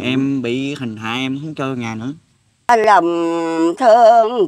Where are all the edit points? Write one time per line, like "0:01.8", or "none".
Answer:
0:02.7